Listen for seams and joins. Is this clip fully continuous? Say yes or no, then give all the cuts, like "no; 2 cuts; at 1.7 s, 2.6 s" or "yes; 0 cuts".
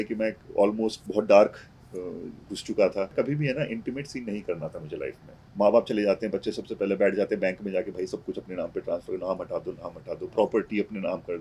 no; 2 cuts; at 3.1 s, 5.3 s